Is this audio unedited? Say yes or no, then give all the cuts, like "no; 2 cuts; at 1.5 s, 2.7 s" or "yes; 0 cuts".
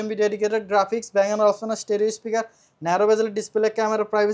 yes; 0 cuts